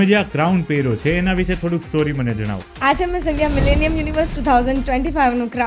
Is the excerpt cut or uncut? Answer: cut